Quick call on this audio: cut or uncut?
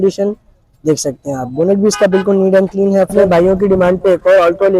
cut